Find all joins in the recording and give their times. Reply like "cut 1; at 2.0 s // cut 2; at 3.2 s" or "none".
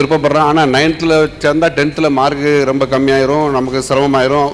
none